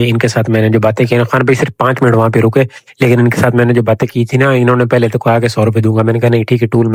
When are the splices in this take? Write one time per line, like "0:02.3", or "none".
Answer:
none